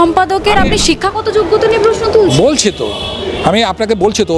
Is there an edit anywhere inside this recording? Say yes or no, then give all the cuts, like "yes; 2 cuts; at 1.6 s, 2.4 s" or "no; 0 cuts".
no; 0 cuts